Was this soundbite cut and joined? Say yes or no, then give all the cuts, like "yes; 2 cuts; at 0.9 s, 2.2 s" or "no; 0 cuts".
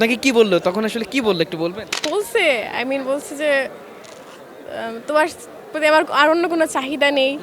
yes; 1 cut; at 1.9 s